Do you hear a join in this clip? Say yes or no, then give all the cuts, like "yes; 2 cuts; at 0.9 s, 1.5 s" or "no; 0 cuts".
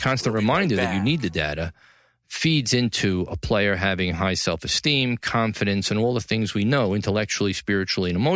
no; 0 cuts